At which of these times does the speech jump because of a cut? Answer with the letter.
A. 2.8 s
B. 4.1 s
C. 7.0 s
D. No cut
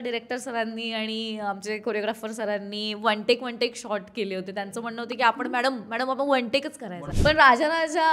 C